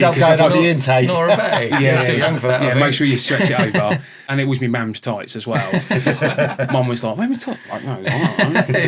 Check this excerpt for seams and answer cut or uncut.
cut